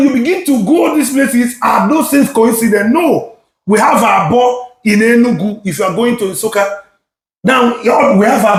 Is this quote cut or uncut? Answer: uncut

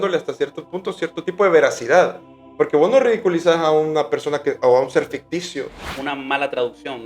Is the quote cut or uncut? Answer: cut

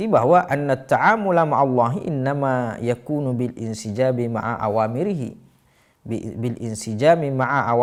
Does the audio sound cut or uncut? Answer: uncut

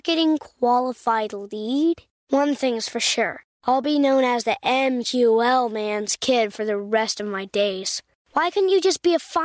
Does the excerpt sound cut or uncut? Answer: uncut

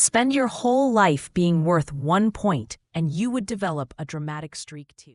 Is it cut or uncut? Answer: uncut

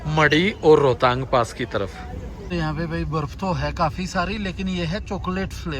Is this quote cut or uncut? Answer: cut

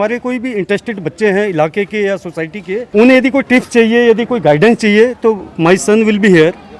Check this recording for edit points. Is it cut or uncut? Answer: cut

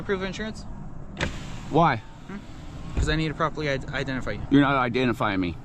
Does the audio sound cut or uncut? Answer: uncut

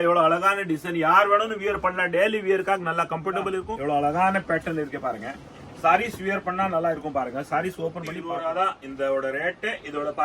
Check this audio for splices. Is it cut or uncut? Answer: cut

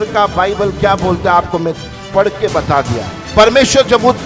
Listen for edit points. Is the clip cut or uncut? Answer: cut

